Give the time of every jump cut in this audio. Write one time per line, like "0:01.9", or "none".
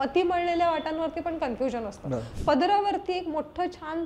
0:02.3